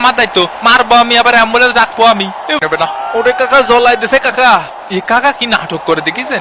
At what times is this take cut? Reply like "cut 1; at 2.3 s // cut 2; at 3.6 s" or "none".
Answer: cut 1; at 2.6 s